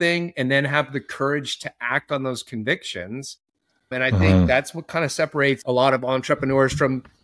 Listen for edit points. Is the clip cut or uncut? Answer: cut